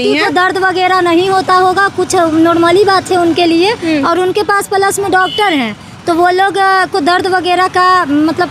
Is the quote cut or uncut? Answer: uncut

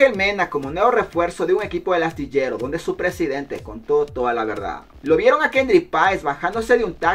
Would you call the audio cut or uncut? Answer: cut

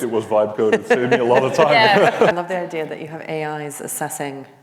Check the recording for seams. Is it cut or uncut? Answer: cut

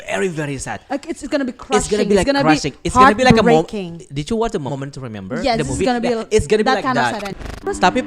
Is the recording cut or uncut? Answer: cut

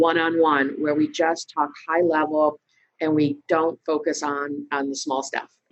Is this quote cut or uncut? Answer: uncut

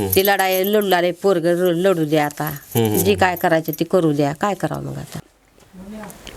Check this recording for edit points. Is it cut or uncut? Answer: cut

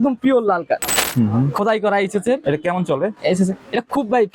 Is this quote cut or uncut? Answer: cut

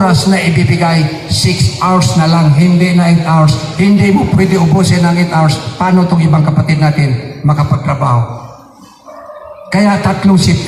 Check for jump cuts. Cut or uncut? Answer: uncut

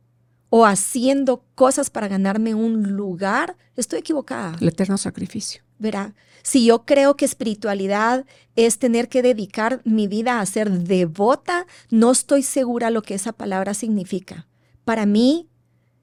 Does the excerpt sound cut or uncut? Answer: uncut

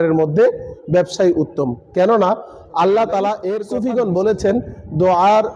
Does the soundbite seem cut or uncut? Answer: cut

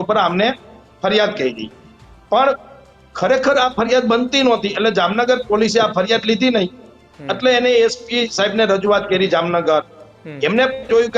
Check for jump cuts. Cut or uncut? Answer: uncut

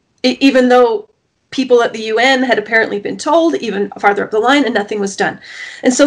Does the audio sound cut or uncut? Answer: uncut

